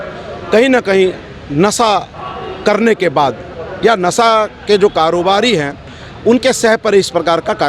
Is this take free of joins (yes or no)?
yes